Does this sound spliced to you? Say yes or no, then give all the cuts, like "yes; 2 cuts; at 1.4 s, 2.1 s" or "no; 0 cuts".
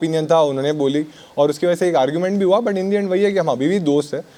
no; 0 cuts